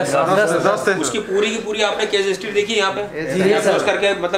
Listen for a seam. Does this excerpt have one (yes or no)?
no